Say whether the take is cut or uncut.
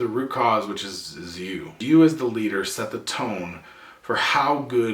cut